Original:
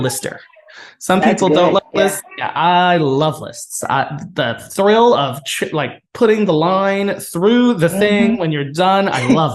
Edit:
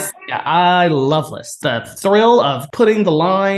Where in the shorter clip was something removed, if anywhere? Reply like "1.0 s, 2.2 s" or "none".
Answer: 1.5 s, 2.6 s